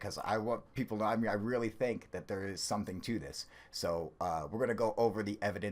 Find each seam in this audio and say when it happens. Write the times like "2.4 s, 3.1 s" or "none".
4.2 s